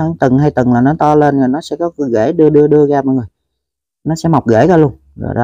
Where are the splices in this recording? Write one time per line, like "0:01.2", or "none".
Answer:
none